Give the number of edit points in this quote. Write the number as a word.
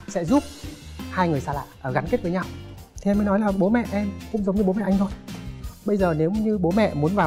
one